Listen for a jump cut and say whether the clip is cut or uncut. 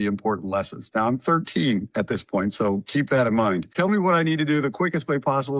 cut